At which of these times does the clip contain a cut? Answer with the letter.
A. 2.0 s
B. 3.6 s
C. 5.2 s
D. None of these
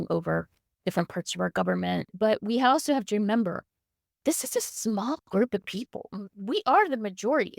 A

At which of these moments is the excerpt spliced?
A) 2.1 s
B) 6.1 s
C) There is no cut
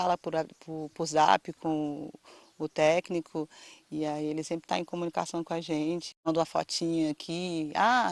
B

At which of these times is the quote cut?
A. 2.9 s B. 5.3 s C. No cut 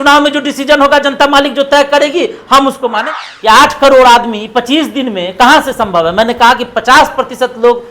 A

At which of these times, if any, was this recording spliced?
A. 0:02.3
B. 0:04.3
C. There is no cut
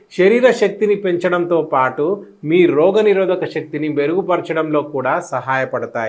C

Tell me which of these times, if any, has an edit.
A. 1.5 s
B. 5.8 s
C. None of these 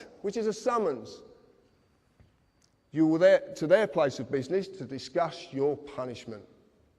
B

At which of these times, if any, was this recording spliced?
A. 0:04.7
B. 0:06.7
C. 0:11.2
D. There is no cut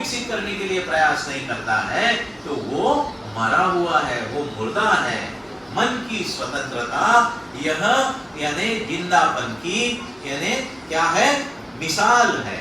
D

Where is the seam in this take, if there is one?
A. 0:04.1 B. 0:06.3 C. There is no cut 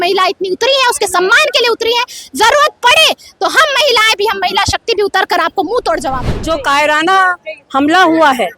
B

